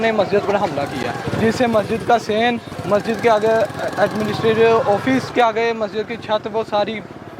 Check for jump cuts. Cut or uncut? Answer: cut